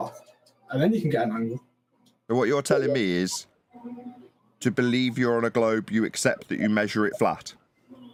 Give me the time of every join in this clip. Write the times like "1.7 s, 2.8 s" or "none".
none